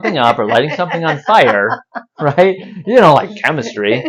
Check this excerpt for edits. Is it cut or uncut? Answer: uncut